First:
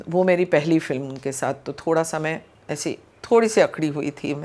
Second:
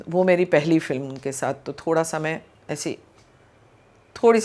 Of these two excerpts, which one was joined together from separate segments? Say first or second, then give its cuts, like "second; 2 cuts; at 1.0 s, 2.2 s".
first; 1 cut; at 3.1 s